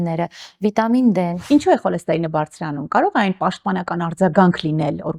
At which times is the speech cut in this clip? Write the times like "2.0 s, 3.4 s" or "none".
1.4 s